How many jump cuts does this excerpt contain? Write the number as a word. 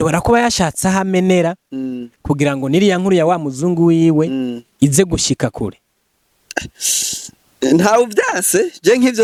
zero